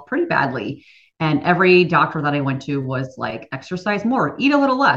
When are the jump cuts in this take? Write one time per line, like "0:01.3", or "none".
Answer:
0:03.4